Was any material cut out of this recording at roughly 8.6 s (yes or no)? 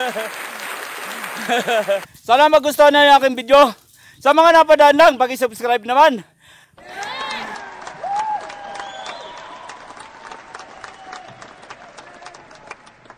no